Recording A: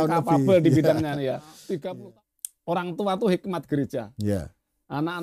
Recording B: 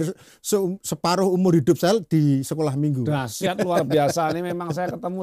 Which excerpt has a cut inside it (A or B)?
A